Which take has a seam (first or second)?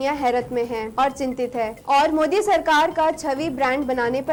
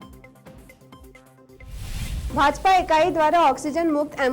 second